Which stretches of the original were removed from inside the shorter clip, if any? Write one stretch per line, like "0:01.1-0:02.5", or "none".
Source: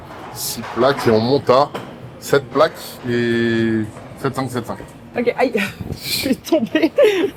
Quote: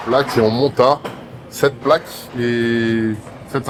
none